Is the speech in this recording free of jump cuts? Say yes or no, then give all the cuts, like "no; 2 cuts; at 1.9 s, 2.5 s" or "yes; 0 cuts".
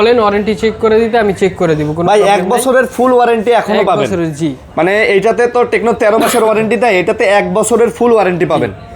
yes; 0 cuts